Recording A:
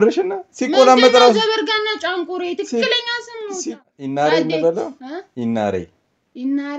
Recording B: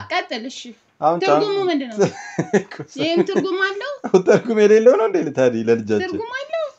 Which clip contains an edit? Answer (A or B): A